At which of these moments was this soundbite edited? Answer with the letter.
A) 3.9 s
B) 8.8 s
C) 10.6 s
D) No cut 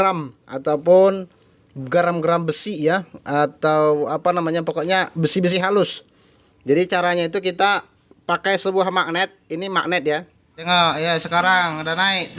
C